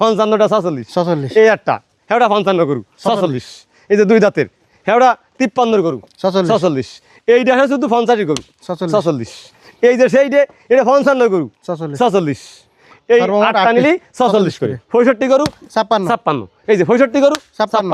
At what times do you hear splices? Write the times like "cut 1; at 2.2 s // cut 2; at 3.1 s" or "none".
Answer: cut 1; at 14.8 s